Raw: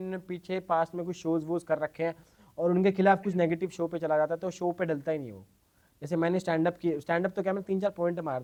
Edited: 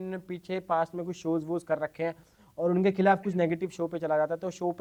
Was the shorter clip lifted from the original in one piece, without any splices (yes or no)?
yes